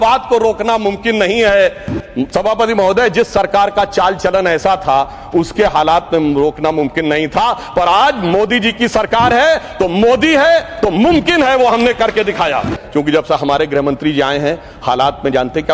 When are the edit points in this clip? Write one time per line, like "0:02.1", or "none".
0:12.8